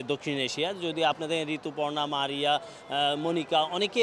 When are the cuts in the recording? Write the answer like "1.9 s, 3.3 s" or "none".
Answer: none